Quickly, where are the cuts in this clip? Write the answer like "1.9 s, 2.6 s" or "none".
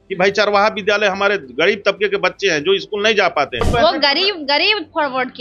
3.7 s